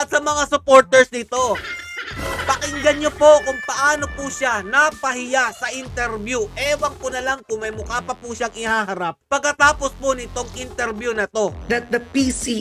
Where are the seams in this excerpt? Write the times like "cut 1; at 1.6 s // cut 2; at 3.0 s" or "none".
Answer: cut 1; at 11.6 s

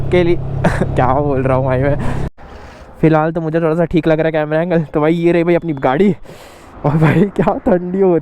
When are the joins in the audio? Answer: cut 1; at 2.3 s

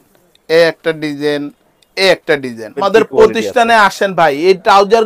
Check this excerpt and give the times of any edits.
cut 1; at 2.8 s

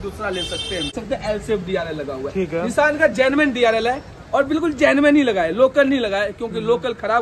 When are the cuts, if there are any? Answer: cut 1; at 0.9 s

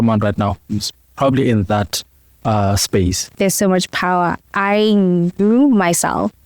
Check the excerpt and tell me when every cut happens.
cut 1; at 3.3 s

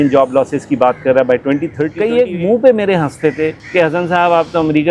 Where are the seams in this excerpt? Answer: cut 1; at 1.9 s // cut 2; at 3.6 s

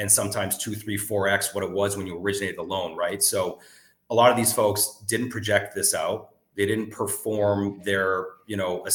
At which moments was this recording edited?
none

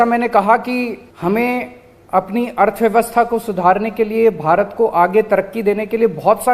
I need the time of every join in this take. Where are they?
cut 1; at 1.1 s

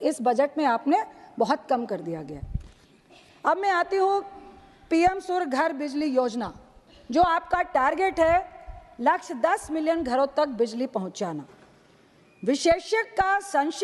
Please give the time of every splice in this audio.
none

